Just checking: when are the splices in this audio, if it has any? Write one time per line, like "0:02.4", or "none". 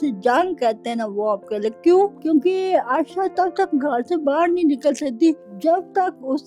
0:02.2
0:05.5